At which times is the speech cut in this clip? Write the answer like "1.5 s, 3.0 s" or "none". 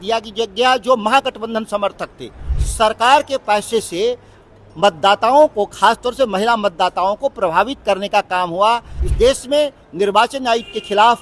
2.5 s, 9.0 s